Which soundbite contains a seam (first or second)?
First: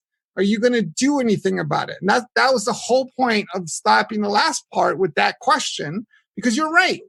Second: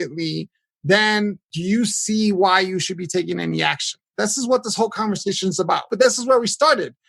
second